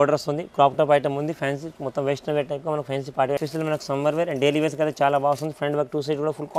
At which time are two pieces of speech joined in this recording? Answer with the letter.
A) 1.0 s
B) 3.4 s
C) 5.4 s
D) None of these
B